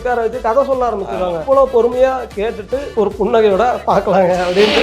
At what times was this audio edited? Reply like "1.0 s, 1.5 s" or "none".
1.4 s, 2.8 s